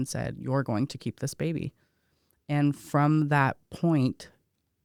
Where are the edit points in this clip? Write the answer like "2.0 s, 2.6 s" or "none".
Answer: none